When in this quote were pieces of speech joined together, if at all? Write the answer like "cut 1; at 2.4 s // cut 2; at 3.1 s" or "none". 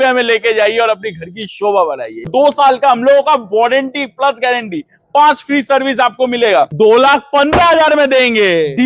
cut 1; at 2.3 s // cut 2; at 6.7 s